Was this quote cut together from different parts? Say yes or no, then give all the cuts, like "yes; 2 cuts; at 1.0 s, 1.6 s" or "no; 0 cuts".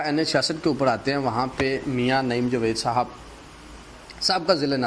no; 0 cuts